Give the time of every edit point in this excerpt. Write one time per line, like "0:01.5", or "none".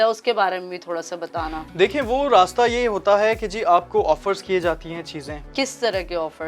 0:05.4